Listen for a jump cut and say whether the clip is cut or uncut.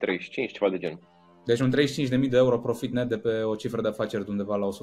uncut